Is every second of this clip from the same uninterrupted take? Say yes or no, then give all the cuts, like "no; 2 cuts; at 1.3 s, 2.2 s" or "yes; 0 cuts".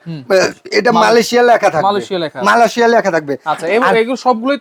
yes; 0 cuts